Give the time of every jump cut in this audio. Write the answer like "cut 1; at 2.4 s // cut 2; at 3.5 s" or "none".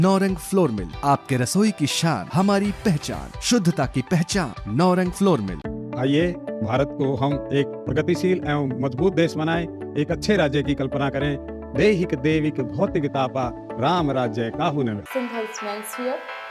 none